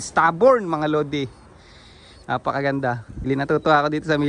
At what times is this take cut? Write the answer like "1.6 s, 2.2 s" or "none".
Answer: 3.3 s